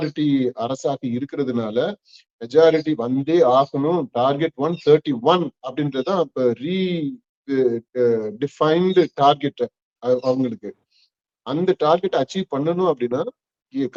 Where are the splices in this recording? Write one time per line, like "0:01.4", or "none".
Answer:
none